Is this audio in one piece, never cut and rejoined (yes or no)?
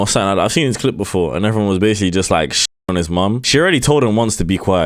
no